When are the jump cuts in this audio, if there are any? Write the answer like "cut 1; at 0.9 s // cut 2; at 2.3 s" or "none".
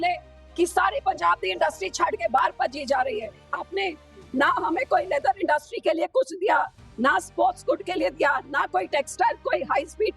cut 1; at 3.6 s